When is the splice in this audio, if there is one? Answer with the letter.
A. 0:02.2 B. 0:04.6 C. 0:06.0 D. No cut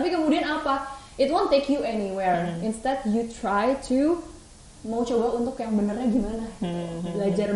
D